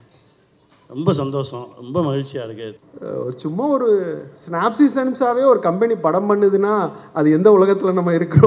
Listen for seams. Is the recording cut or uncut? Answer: cut